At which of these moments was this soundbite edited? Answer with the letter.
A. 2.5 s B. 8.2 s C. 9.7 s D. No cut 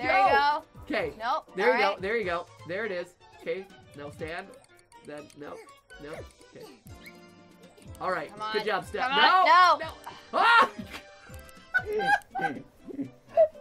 D